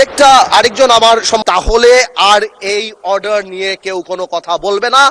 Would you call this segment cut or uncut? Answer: cut